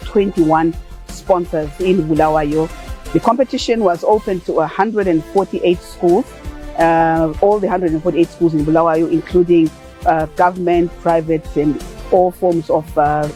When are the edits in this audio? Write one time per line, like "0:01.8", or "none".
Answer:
none